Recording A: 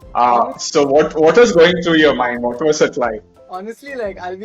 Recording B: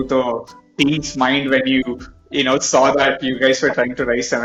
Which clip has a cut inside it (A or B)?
A